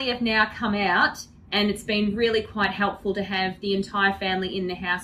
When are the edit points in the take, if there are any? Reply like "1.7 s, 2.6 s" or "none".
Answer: none